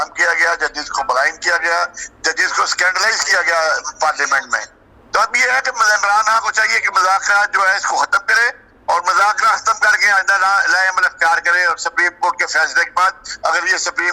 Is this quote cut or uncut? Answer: uncut